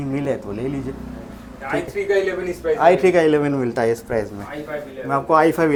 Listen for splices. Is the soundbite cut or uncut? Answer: uncut